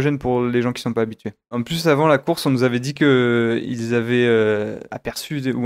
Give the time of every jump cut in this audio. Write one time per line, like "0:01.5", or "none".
0:01.6